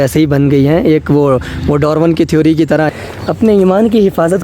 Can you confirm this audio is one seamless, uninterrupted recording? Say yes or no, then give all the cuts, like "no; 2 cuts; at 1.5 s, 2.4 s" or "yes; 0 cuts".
no; 1 cut; at 2.9 s